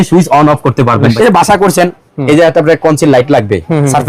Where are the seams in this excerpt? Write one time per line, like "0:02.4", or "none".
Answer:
0:01.1